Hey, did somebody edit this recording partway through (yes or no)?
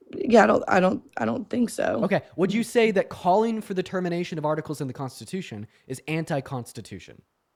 no